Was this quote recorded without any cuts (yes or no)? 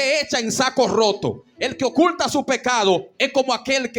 yes